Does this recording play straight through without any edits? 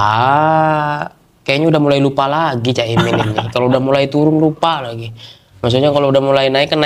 yes; 0 cuts

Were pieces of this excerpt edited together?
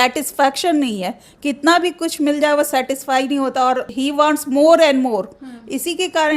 no; 0 cuts

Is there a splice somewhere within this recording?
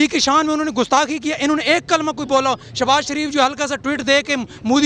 no; 0 cuts

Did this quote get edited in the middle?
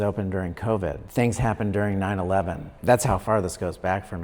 yes; 2 cuts; at 1.0 s, 2.7 s

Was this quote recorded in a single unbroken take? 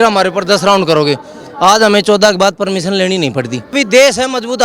no; 1 cut; at 3.7 s

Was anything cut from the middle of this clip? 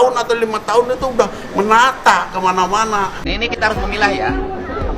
yes; 1 cut; at 3.2 s

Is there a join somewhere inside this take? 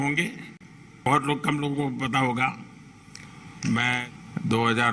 yes; 2 cuts; at 1.1 s, 4.0 s

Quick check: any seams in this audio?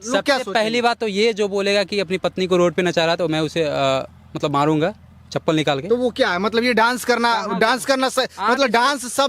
no; 0 cuts

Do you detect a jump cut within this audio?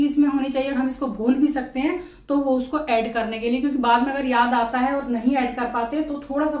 no; 0 cuts

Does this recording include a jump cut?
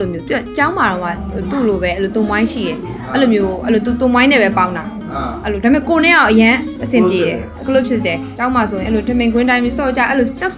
yes; 1 cut; at 8.3 s

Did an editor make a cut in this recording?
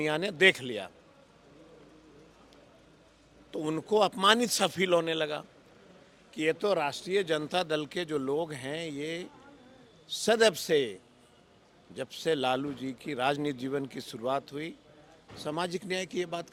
no; 0 cuts

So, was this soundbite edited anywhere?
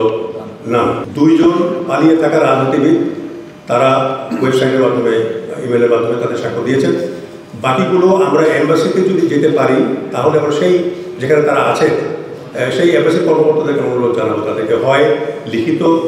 yes; 1 cut; at 1.0 s

